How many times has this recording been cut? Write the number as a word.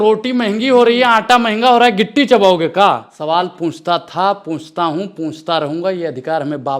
one